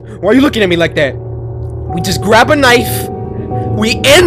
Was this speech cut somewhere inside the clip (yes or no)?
no